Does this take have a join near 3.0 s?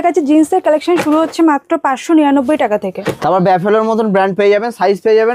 no; 0 cuts

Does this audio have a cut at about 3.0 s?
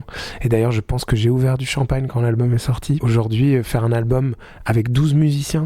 yes; 1 cut; at 3.0 s

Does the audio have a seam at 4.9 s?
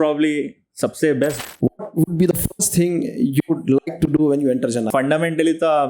yes; 2 cuts; at 1.4 s, 4.9 s

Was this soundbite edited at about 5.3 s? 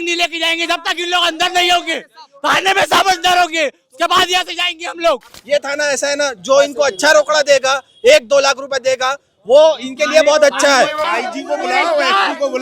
yes; 2 cuts; at 5.3 s, 11.0 s

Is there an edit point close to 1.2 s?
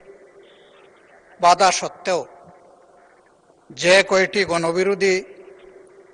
no; 0 cuts

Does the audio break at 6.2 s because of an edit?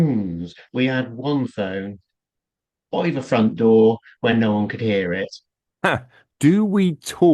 yes; 1 cut; at 6.2 s

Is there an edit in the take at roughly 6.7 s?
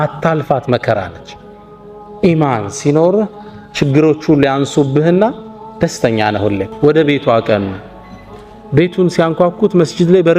yes; 1 cut; at 6.7 s

